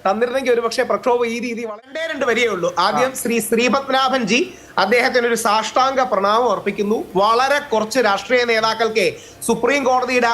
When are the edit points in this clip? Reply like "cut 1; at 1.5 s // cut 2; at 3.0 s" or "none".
cut 1; at 1.7 s